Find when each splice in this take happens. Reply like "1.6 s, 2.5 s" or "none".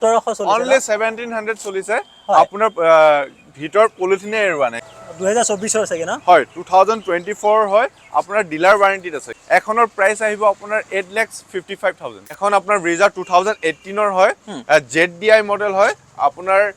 4.9 s, 9.3 s, 12.4 s